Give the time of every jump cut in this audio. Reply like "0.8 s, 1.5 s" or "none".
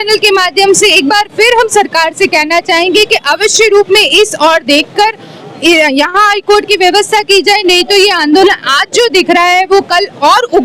none